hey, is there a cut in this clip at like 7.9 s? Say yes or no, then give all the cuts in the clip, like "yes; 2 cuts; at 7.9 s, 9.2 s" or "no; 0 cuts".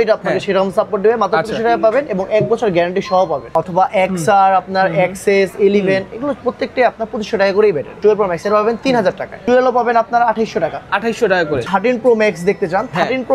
yes; 4 cuts; at 3.5 s, 7.9 s, 9.4 s, 11.7 s